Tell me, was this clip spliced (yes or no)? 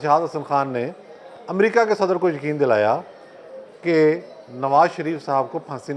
no